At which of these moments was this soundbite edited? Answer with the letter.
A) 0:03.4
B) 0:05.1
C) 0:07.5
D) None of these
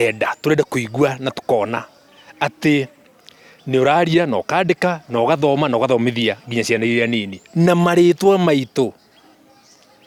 D